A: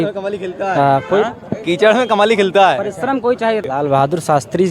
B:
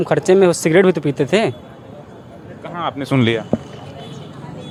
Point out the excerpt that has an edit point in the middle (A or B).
A